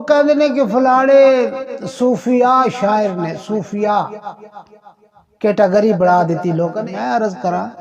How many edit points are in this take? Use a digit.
1